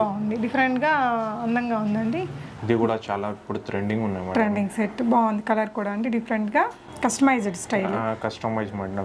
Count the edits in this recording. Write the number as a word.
two